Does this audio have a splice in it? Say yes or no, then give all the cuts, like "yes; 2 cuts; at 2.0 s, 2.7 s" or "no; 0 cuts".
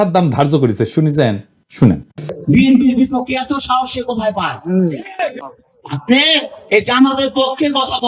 yes; 1 cut; at 2.3 s